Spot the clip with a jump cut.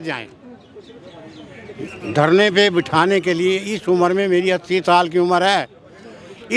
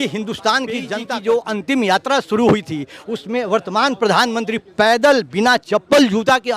second; 1 cut; at 1.0 s

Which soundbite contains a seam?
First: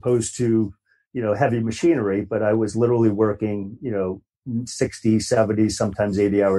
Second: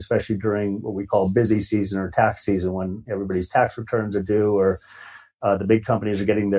first; 1 cut; at 4.3 s

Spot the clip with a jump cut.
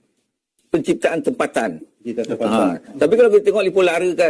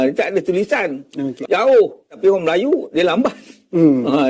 second; 1 cut; at 1.3 s

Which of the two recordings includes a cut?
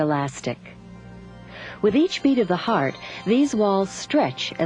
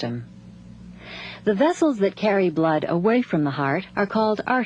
second; 1 cut; at 2.6 s

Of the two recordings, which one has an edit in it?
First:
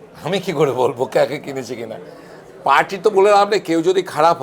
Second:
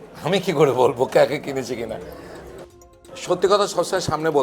second; 1 cut; at 2.7 s

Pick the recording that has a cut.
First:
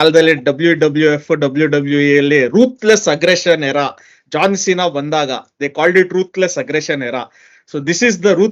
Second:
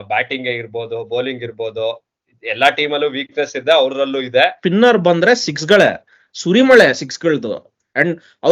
second; 1 cut; at 4.6 s

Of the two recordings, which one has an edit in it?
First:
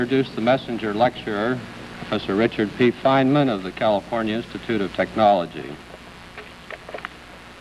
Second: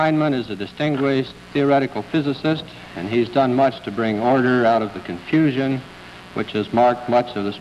second; 1 cut; at 3.7 s

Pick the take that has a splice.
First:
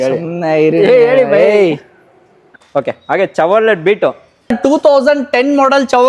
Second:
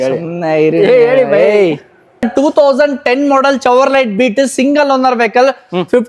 second; 1 cut; at 2.0 s

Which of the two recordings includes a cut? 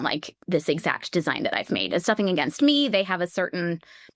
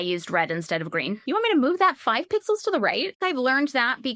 second; 2 cuts; at 1.2 s, 3.2 s

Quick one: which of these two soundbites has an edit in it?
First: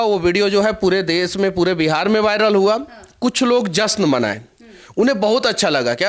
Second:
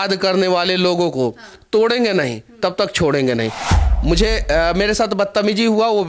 second; 1 cut; at 3.6 s

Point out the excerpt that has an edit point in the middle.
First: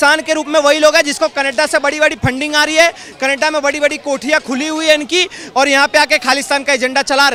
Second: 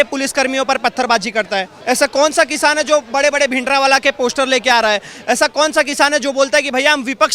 second; 1 cut; at 1.7 s

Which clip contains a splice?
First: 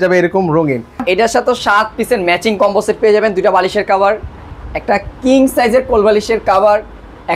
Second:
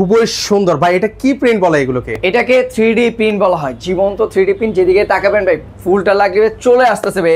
first; 1 cut; at 1.0 s

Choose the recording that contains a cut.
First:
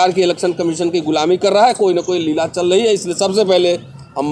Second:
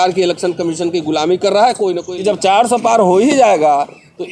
second; 1 cut; at 2.1 s

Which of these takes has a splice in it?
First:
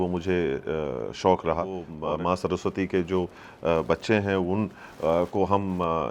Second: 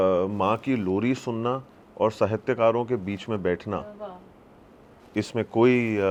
first; 1 cut; at 1.9 s

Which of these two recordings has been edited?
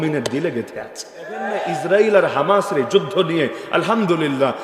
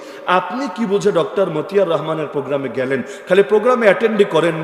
first; 1 cut; at 1.5 s

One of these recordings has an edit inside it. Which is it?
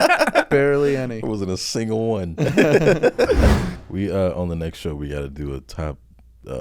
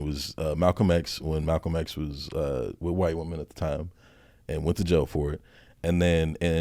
first; 1 cut; at 3.8 s

